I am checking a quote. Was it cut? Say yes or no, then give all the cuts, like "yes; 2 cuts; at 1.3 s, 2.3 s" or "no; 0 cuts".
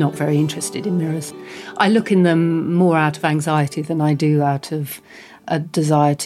yes; 1 cut; at 1.3 s